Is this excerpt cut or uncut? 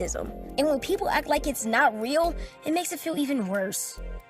cut